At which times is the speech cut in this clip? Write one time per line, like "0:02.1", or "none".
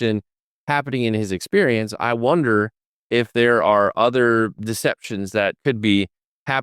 0:05.6